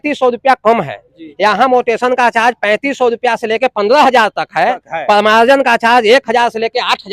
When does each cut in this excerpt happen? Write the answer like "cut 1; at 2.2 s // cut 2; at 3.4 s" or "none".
none